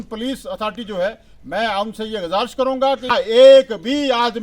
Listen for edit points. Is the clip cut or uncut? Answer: cut